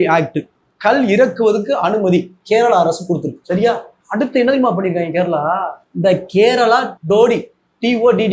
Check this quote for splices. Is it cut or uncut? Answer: uncut